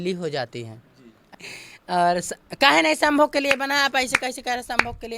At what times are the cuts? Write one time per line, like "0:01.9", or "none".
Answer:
0:01.3